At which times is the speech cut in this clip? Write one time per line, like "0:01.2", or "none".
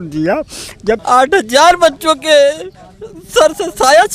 0:01.0